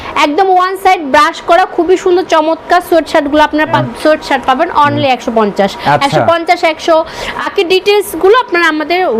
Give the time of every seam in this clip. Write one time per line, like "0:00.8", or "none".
0:03.8
0:07.5